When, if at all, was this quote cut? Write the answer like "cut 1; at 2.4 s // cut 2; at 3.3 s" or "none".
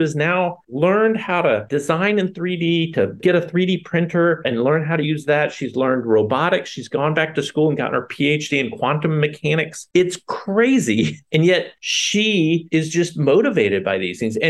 cut 1; at 1.7 s // cut 2; at 3.2 s